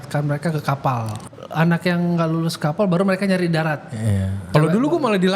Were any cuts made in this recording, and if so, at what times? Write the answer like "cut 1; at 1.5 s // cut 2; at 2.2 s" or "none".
cut 1; at 1.1 s // cut 2; at 4.4 s